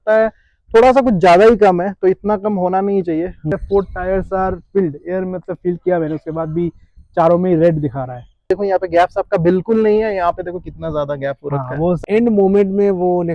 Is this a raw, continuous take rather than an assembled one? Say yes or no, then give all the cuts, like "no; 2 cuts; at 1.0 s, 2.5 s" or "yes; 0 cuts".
no; 3 cuts; at 3.5 s, 8.5 s, 12.0 s